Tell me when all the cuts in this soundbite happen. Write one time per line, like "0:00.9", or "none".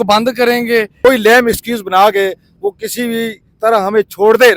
0:01.0